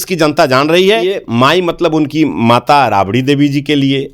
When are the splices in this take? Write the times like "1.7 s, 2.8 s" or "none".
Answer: 1.3 s